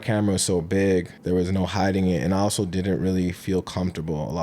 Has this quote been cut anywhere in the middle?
yes; 1 cut; at 1.1 s

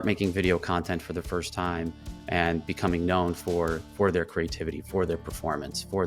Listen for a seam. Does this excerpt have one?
no; 0 cuts

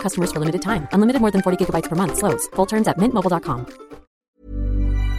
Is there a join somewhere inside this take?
yes; 1 cut; at 4.2 s

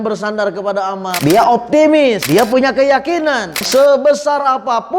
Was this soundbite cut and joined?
yes; 3 cuts; at 1.1 s, 2.2 s, 3.6 s

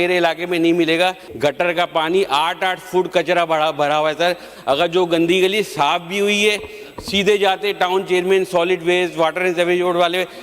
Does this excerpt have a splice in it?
yes; 1 cut; at 1.3 s

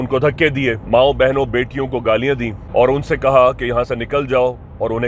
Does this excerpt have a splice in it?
yes; 2 cuts; at 0.8 s, 2.6 s

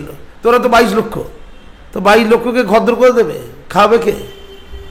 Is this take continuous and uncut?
yes; 0 cuts

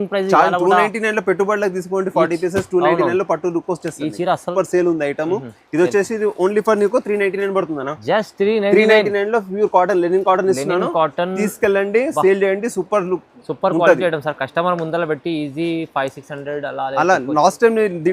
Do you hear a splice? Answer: yes; 1 cut; at 4.5 s

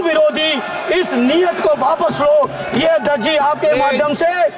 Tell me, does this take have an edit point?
no; 0 cuts

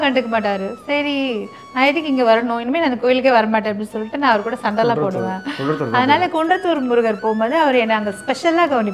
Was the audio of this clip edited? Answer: no; 0 cuts

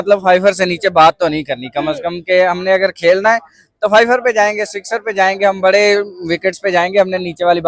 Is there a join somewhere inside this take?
no; 0 cuts

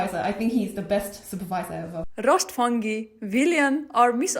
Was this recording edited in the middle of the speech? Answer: yes; 1 cut; at 2.0 s

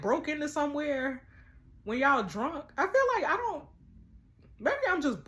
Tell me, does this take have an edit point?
no; 0 cuts

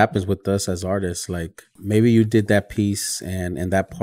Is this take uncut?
no; 1 cut; at 1.7 s

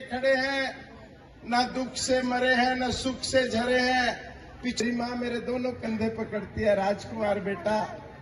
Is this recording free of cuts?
no; 1 cut; at 4.8 s

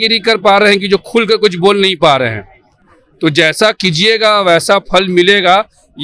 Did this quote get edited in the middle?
no; 0 cuts

